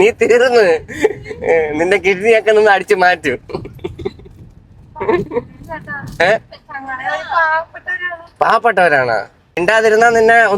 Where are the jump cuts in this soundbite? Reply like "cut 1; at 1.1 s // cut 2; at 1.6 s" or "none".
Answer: cut 1; at 9.6 s

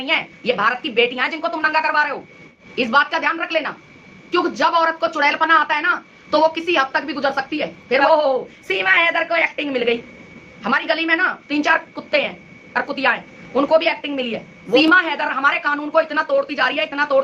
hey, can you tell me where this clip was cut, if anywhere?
cut 1; at 2.6 s // cut 2; at 8.0 s // cut 3; at 14.8 s

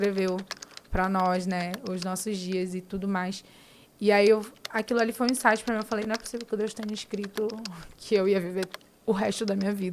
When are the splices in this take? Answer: none

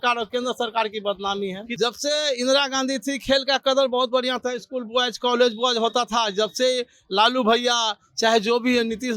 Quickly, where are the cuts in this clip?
cut 1; at 1.6 s

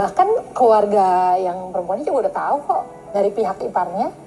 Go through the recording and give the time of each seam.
cut 1; at 3.2 s

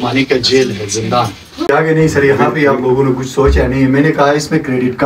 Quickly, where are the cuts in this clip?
cut 1; at 1.7 s

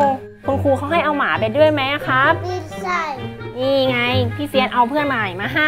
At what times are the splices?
cut 1; at 3.3 s

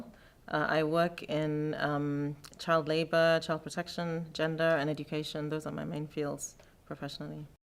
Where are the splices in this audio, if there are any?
none

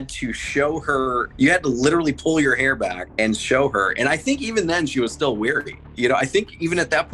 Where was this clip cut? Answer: cut 1; at 1.3 s // cut 2; at 3.0 s // cut 3; at 5.8 s

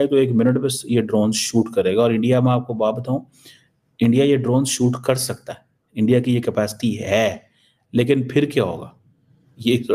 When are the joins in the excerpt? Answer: none

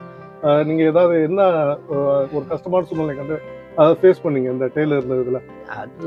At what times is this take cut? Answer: none

